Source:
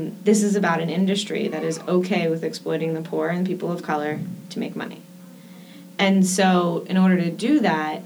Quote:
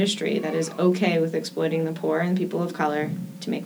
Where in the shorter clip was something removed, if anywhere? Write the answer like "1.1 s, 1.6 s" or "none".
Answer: none